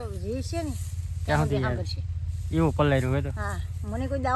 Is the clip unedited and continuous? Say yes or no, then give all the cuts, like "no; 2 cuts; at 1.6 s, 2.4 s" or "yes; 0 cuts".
yes; 0 cuts